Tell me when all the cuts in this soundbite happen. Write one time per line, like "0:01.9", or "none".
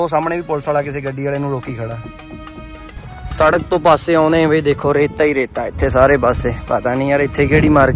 0:03.1